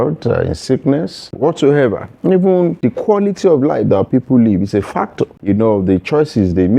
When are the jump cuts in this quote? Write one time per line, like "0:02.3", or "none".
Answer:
0:01.3
0:02.8
0:05.4